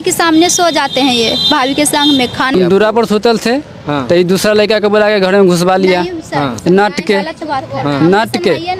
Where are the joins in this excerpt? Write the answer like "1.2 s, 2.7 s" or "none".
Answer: 2.5 s